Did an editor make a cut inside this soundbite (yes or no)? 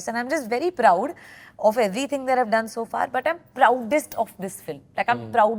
no